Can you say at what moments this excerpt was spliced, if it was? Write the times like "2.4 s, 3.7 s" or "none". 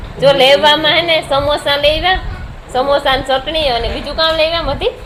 none